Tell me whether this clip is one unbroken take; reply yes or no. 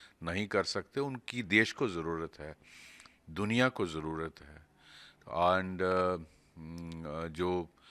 yes